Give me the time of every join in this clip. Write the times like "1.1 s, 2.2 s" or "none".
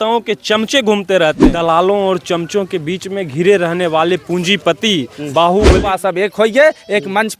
1.5 s, 5.8 s